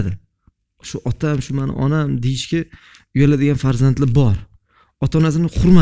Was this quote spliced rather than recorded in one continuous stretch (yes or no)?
no